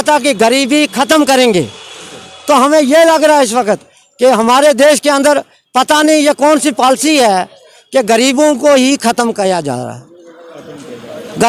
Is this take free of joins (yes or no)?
yes